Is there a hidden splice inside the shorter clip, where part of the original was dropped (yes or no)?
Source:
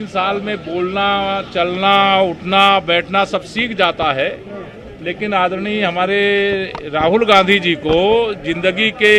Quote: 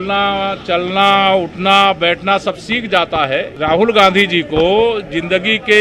yes